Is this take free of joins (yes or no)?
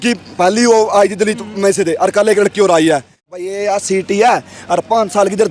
no